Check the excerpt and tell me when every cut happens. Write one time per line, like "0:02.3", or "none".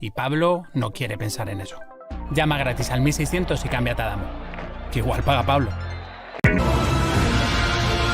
0:06.4